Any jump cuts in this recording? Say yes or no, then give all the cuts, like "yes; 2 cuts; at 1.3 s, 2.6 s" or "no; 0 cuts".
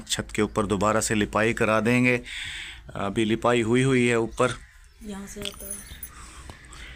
no; 0 cuts